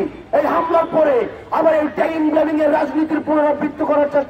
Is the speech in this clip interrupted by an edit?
no; 0 cuts

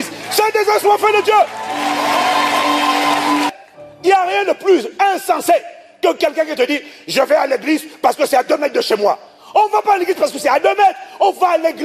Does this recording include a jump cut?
yes; 1 cut; at 3.6 s

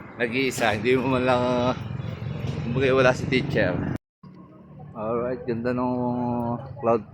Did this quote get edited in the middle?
yes; 1 cut; at 4.0 s

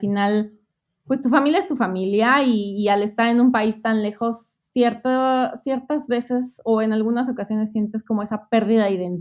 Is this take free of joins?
yes; 0 cuts

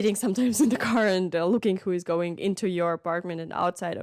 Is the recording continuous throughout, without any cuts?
yes; 0 cuts

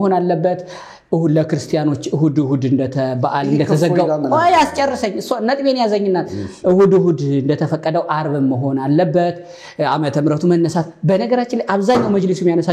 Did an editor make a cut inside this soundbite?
no; 0 cuts

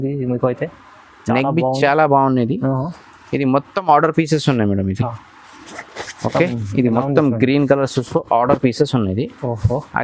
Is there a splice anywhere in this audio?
no; 0 cuts

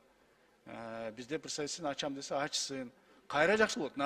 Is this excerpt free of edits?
yes; 0 cuts

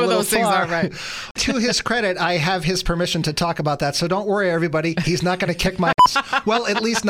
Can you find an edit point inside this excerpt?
yes; 1 cut; at 1.4 s

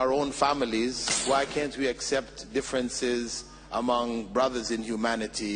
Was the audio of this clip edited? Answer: yes; 1 cut; at 1.1 s

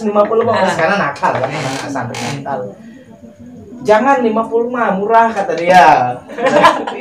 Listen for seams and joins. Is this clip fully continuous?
yes; 0 cuts

